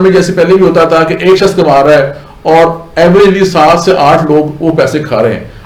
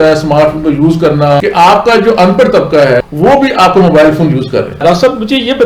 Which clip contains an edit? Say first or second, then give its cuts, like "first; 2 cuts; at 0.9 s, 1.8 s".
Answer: second; 3 cuts; at 1.4 s, 3.0 s, 4.7 s